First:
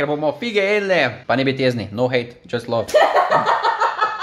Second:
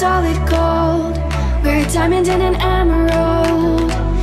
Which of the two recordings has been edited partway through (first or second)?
first